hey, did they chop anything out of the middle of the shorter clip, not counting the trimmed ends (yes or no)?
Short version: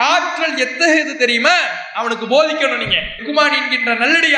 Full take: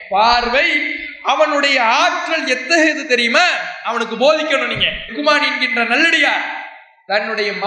no